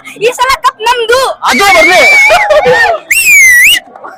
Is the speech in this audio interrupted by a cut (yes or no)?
no